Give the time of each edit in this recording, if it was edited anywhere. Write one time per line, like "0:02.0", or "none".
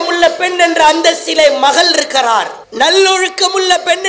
0:02.6

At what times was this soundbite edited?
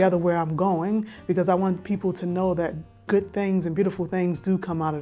none

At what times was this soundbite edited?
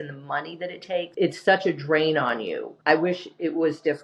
0:01.1
0:02.7

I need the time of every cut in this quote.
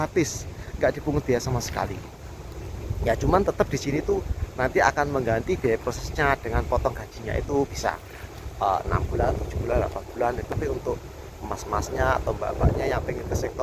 0:10.5

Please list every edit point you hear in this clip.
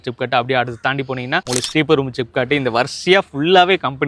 none

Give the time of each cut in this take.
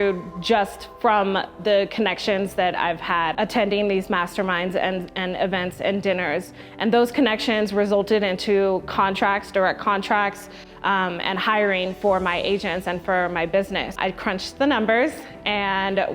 0:03.3
0:14.0

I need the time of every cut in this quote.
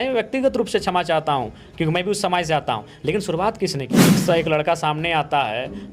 0:04.0

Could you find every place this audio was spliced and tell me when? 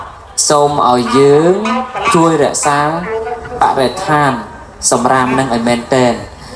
none

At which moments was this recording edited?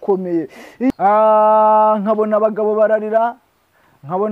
0:00.9

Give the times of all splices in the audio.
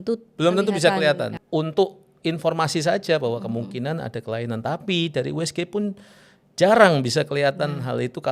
0:01.4

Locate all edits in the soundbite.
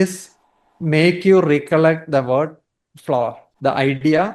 0:03.4

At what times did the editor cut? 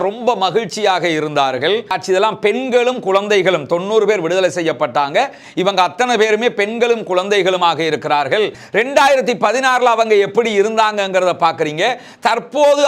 0:02.0
0:08.6

